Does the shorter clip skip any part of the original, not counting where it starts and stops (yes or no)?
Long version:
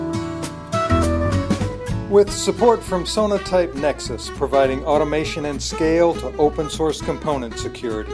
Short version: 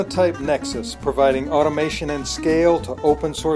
no